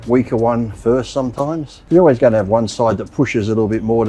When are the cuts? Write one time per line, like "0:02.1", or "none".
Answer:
0:01.7